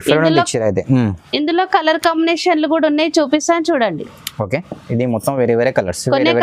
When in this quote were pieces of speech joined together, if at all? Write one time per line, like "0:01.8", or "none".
none